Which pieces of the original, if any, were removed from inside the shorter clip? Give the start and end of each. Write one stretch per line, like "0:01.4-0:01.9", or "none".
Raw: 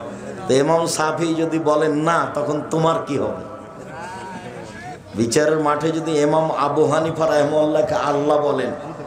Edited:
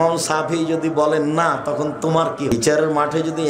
0:03.2-0:05.2